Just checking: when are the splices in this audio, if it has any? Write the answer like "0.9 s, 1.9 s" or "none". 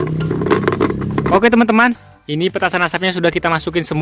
1.3 s